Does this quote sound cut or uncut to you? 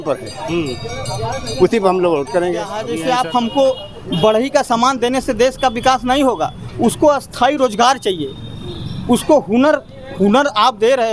cut